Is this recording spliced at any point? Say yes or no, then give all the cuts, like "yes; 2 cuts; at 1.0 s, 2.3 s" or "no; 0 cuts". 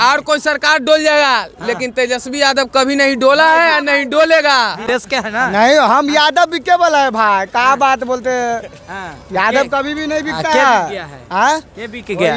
yes; 1 cut; at 4.8 s